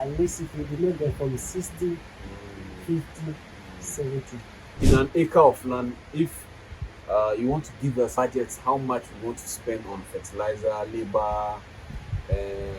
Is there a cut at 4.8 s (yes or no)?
yes